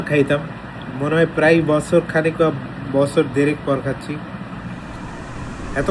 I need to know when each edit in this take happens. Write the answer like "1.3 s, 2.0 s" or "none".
none